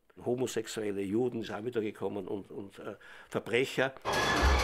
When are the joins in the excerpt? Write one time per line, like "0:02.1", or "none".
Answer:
0:01.6